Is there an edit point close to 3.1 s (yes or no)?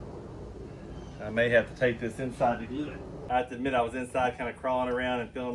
yes